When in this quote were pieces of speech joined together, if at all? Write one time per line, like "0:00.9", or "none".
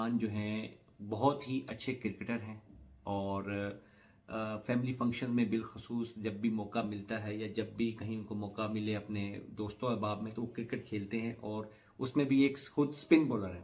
none